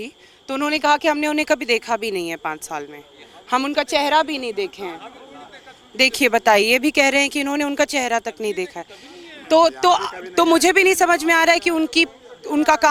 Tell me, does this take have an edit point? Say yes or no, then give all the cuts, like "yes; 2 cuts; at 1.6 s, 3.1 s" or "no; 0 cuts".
no; 0 cuts